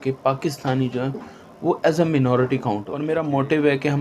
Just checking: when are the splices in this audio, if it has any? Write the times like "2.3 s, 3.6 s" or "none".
3.0 s